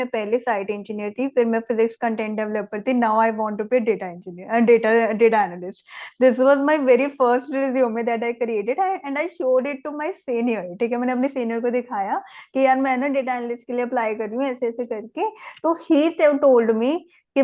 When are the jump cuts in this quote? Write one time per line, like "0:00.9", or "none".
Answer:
none